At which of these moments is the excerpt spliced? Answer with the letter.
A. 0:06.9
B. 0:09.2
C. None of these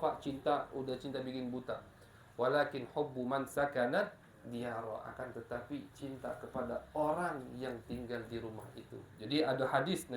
B